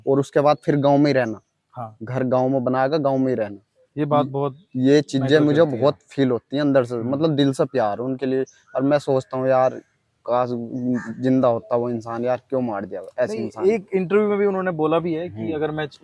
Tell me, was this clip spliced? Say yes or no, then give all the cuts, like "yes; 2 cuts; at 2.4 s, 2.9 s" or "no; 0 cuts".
no; 0 cuts